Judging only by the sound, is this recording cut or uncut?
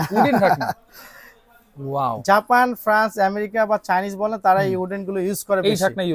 uncut